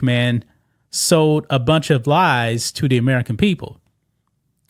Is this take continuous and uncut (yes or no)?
yes